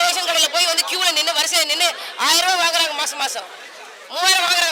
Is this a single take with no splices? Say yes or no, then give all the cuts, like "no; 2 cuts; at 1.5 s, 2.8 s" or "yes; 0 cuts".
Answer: yes; 0 cuts